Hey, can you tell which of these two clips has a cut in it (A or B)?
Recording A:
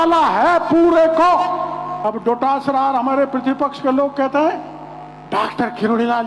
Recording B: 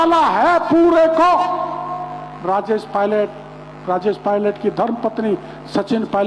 A